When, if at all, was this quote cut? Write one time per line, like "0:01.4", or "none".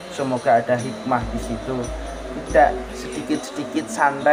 none